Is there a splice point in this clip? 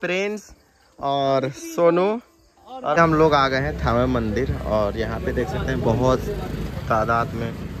yes; 1 cut; at 3.0 s

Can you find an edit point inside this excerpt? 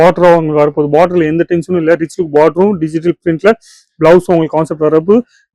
no; 0 cuts

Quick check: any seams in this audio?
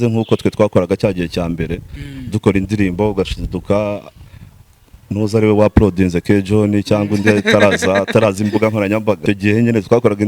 yes; 1 cut; at 9.2 s

